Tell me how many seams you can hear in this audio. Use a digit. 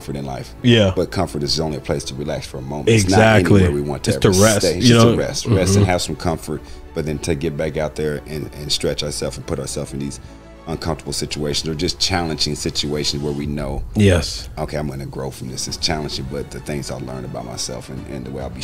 0